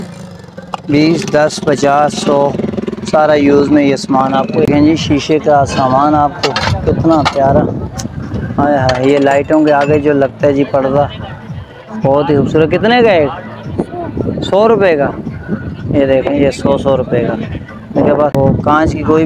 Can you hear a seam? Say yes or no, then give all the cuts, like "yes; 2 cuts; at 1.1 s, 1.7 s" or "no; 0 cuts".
yes; 2 cuts; at 4.7 s, 18.3 s